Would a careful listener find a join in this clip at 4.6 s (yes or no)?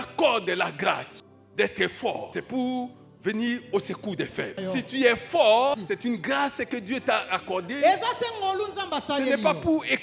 yes